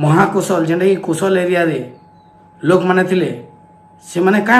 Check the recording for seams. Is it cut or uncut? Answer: uncut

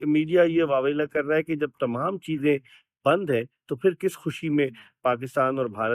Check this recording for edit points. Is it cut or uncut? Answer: uncut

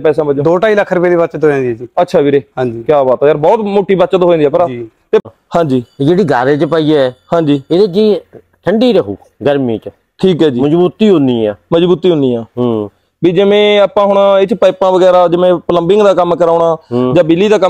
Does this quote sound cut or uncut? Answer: cut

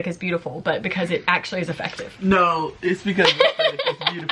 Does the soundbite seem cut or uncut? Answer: uncut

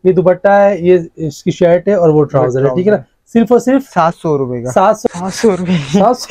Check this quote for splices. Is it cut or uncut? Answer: cut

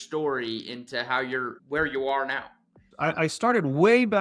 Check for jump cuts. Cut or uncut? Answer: cut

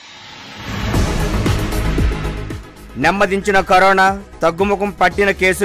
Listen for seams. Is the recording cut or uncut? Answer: cut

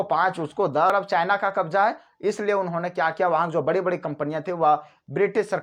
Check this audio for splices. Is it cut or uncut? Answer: cut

